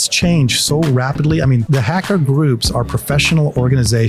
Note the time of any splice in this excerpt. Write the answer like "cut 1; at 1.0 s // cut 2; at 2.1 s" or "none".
cut 1; at 1.6 s

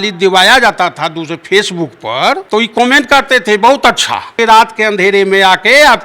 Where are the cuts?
cut 1; at 2.4 s // cut 2; at 4.3 s

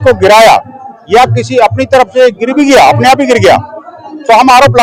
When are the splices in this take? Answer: none

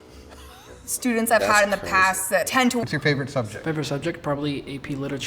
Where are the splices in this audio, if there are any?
cut 1; at 2.8 s

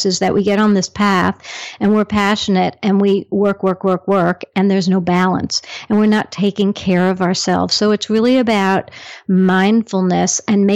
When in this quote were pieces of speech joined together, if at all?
none

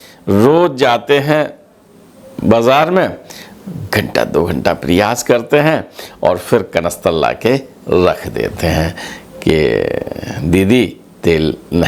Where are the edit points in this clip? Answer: none

